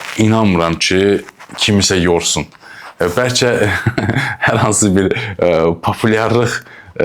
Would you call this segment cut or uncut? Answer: uncut